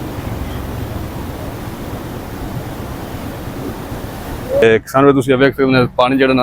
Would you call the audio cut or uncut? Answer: uncut